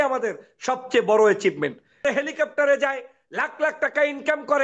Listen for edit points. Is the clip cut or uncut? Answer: cut